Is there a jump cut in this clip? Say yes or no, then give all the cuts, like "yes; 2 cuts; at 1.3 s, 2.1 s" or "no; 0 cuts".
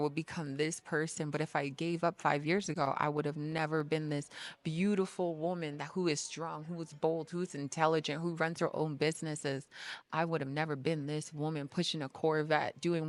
no; 0 cuts